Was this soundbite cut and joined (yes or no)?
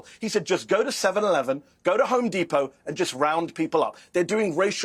no